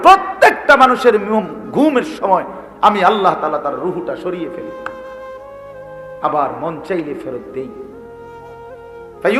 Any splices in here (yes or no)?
yes